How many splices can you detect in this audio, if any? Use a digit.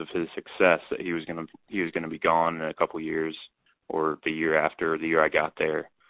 0